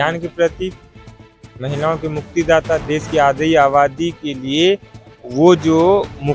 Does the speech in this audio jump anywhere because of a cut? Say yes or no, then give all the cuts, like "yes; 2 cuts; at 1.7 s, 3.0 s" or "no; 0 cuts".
no; 0 cuts